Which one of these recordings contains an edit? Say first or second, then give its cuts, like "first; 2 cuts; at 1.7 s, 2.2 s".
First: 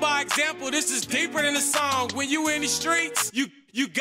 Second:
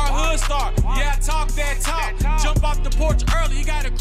first; 1 cut; at 2.4 s